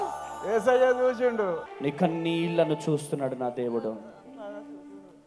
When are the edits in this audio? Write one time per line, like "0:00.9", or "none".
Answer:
0:01.7